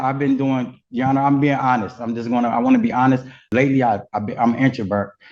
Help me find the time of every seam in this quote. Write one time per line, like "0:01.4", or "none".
0:03.4

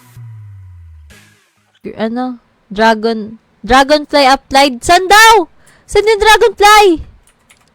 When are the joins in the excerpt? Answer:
0:01.9

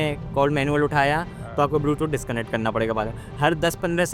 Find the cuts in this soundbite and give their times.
none

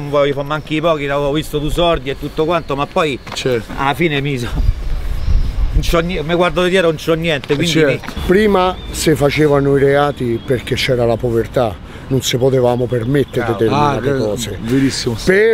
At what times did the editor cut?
none

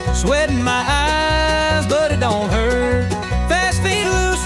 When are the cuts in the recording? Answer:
none

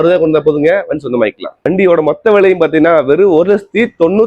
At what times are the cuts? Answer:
0:01.6

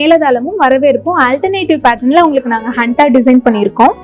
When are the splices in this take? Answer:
none

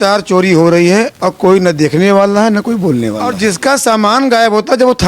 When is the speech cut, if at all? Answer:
0:03.3

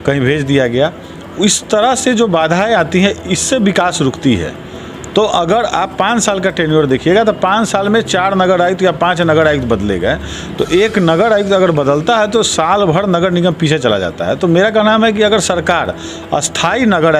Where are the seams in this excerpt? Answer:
none

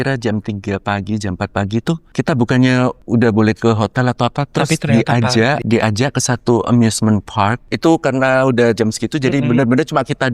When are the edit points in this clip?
0:02.1
0:03.0
0:05.6
0:07.6

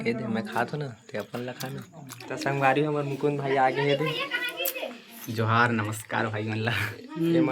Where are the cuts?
0:02.1

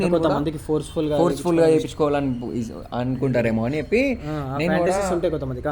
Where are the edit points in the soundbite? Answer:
none

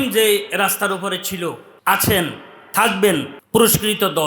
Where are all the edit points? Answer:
0:01.7
0:03.4

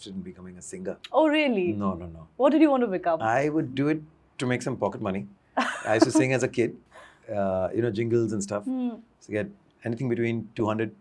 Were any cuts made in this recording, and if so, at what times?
none

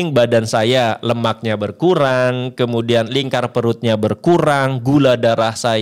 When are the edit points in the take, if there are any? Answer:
none

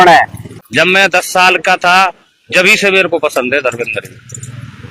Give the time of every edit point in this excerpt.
0:00.9

